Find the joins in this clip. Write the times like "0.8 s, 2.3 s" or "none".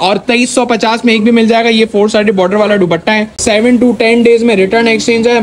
3.3 s